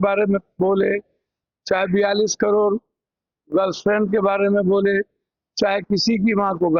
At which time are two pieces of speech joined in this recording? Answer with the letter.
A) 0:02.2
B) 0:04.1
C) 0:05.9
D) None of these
D